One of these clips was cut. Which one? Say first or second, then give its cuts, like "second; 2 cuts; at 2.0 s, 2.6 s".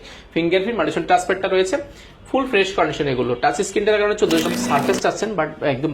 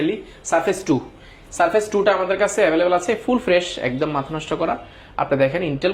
first; 1 cut; at 4.4 s